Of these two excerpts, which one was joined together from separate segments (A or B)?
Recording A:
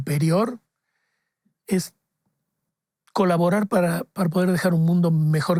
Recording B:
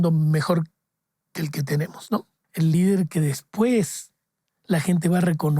B